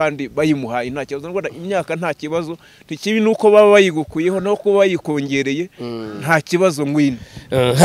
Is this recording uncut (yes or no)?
yes